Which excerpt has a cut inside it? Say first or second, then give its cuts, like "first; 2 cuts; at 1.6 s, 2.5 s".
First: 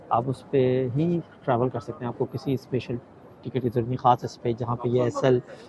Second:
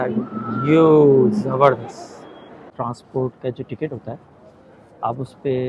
second; 1 cut; at 2.7 s